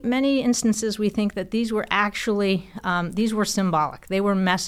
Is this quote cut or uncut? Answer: uncut